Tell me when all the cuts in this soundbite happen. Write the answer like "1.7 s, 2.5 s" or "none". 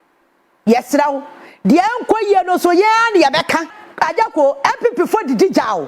3.8 s